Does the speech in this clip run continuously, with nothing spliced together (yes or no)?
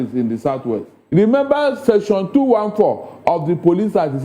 no